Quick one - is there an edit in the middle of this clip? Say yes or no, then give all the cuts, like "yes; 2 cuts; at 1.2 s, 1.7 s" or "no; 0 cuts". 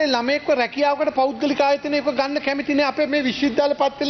no; 0 cuts